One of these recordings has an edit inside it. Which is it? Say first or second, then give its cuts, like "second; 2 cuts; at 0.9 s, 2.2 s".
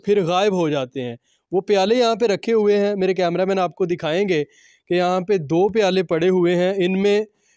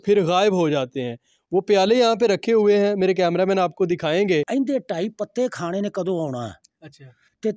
second; 1 cut; at 4.5 s